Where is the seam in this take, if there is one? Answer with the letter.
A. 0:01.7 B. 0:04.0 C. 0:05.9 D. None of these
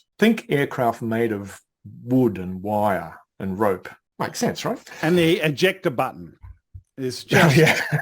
B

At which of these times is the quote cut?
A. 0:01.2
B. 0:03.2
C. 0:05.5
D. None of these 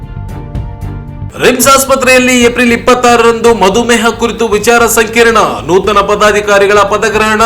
A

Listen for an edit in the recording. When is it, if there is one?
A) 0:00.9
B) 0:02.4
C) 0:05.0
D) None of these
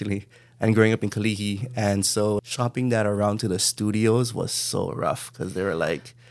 B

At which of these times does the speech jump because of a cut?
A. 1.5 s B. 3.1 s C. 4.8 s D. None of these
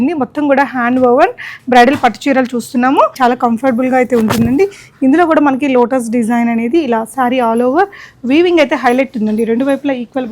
B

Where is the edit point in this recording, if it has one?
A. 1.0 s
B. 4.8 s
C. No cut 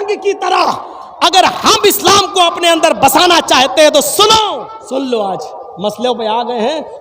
B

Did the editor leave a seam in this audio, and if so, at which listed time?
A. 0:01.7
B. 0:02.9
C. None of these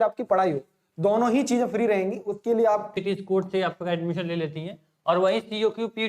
B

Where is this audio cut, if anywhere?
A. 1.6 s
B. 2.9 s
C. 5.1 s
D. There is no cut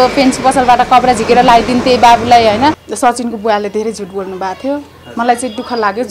B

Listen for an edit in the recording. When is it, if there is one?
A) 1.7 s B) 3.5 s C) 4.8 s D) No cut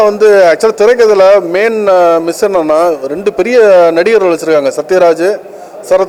D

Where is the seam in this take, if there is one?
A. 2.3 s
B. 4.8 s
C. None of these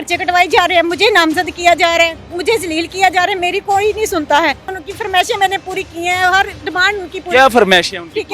B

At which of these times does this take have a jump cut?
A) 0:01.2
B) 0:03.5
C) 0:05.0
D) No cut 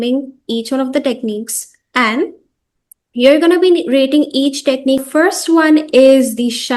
C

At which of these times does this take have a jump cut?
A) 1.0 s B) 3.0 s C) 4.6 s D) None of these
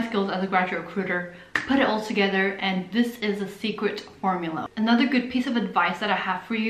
C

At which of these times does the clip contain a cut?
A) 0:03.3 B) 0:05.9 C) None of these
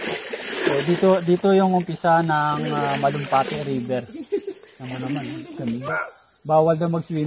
B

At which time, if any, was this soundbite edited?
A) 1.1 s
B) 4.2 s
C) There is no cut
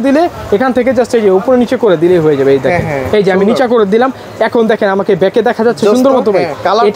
C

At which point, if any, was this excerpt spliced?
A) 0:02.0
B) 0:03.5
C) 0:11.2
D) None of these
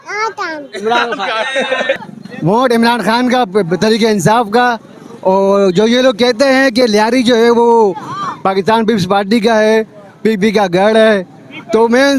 A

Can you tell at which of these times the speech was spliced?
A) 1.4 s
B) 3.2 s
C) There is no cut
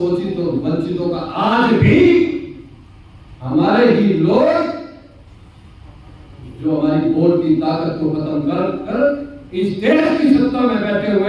C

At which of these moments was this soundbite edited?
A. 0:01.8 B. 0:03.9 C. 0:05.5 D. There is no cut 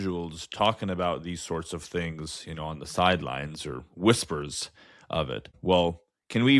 C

